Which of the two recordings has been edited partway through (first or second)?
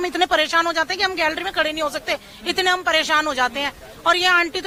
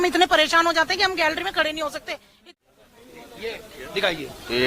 second